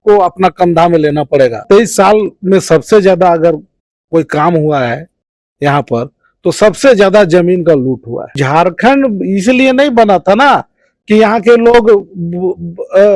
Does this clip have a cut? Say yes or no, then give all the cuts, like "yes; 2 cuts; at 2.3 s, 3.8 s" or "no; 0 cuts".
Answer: yes; 2 cuts; at 1.6 s, 8.4 s